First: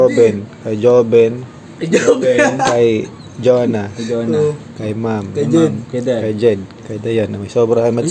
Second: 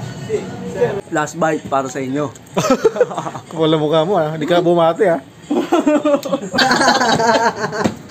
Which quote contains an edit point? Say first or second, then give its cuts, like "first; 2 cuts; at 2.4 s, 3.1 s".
second; 2 cuts; at 1.0 s, 6.6 s